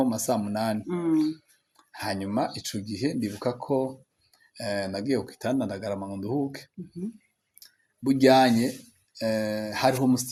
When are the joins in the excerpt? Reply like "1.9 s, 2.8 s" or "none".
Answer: none

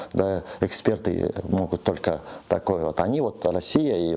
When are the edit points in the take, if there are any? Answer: none

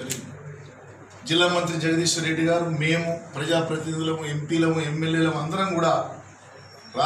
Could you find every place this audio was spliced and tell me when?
none

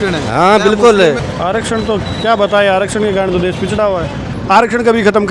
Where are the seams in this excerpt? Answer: 1.2 s, 4.3 s

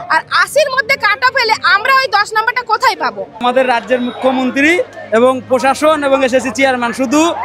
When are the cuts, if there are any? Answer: 3.4 s

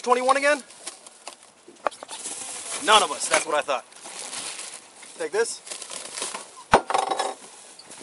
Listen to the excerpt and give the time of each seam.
none

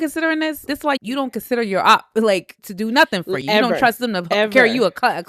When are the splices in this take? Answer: 0.7 s, 2.6 s

